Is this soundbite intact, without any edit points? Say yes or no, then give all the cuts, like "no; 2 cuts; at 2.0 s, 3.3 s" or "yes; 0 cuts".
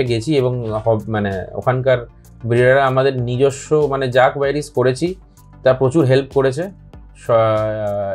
yes; 0 cuts